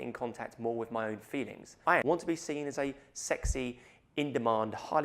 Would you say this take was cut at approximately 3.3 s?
no; 1 cut; at 1.9 s

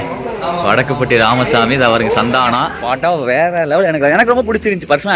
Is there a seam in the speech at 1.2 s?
no; 1 cut; at 2.7 s

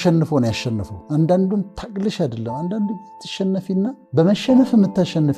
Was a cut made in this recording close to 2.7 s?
no; 2 cuts; at 0.9 s, 4.0 s

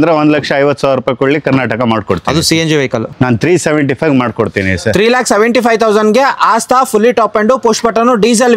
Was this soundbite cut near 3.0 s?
yes; 1 cut; at 3.0 s

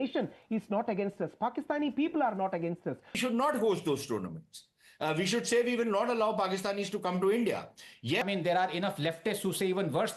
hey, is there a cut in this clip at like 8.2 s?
yes; 2 cuts; at 3.2 s, 8.2 s

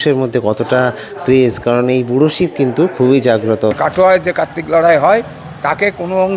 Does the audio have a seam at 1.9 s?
no; 1 cut; at 3.8 s

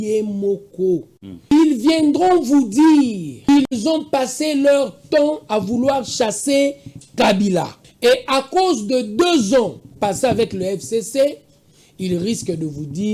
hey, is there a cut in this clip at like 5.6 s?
no; 3 cuts; at 1.5 s, 3.3 s, 7.8 s

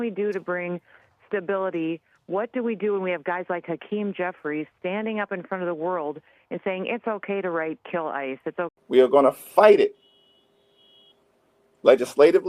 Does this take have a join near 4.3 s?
no; 1 cut; at 8.7 s

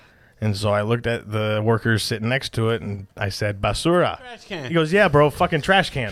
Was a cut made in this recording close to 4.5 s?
yes; 1 cut; at 4.5 s

